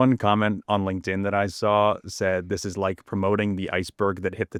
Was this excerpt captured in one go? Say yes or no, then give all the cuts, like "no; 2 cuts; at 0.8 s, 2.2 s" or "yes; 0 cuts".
yes; 0 cuts